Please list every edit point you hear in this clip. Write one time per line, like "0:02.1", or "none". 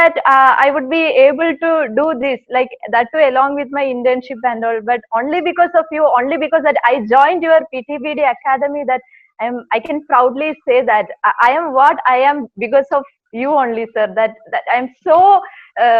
none